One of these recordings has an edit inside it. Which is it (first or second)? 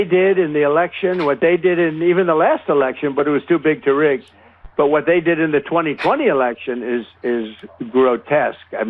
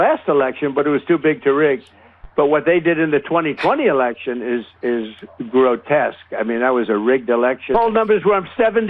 second